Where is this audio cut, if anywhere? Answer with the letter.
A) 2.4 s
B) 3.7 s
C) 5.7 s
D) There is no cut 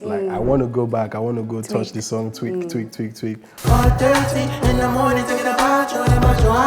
B